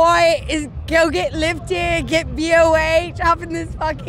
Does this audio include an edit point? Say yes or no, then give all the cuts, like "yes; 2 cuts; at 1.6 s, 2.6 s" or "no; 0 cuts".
no; 0 cuts